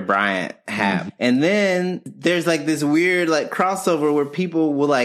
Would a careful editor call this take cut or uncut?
cut